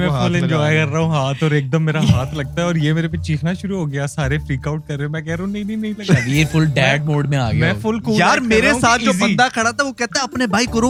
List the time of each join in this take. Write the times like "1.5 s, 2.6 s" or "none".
none